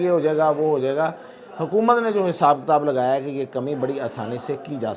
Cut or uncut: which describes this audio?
uncut